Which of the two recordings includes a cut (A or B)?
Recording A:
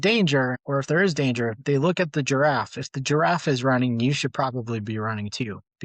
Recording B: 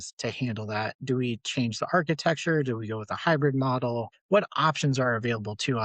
B